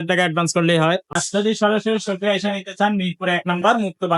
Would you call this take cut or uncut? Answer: cut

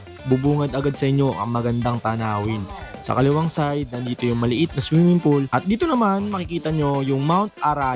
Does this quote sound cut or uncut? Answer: cut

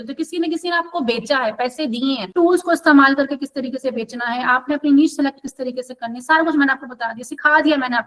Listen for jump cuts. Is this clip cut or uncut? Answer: cut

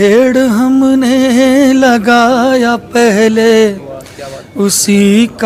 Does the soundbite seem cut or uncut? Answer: uncut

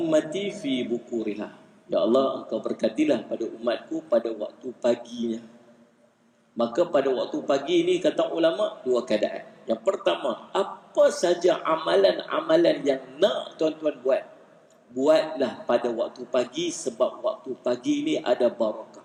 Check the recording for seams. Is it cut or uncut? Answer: uncut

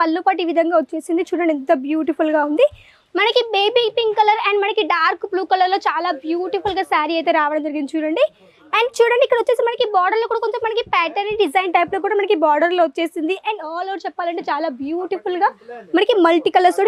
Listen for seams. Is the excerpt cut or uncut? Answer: uncut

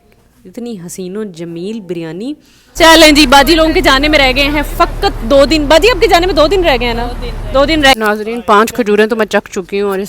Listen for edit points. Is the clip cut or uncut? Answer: cut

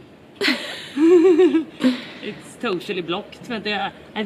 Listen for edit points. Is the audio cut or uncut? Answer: uncut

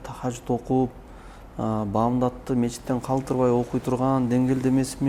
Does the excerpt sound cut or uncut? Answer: uncut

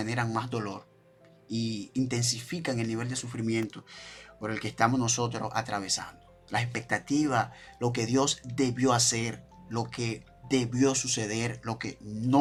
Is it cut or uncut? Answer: uncut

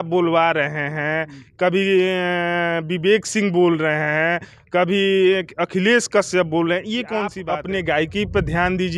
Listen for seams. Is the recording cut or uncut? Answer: cut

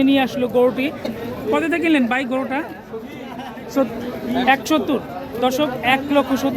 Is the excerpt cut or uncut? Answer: cut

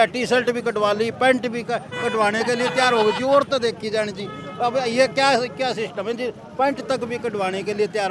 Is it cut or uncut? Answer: uncut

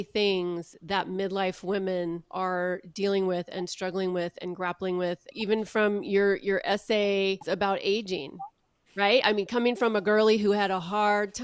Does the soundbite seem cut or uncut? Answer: cut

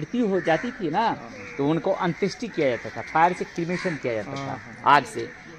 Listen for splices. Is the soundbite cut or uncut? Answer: uncut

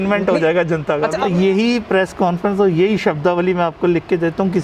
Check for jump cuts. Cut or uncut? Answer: cut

